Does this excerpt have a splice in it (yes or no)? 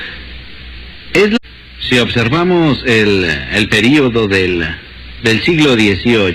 no